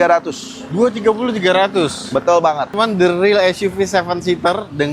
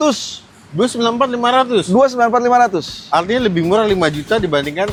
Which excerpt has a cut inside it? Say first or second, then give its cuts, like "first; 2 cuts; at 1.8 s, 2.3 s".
first; 1 cut; at 2.7 s